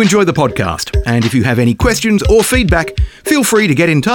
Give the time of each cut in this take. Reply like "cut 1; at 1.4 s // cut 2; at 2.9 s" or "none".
none